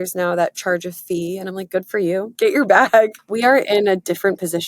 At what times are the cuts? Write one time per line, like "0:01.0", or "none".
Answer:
0:02.3
0:03.2